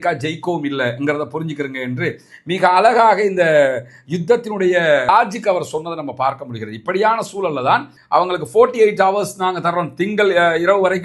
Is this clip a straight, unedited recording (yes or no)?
no